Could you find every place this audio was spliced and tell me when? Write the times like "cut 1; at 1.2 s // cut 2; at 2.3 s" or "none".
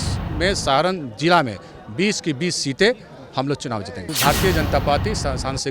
cut 1; at 4.0 s